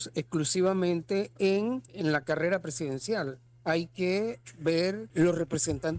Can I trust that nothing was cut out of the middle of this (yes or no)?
no